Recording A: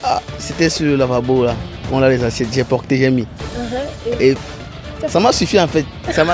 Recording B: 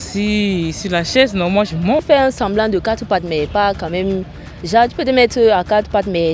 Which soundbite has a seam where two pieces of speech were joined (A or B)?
B